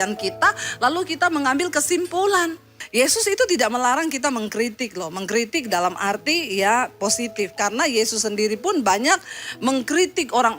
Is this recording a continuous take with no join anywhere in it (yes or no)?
no